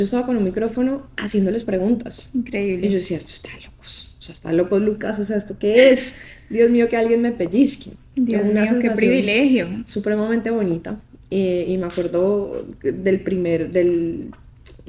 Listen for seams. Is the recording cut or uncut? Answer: uncut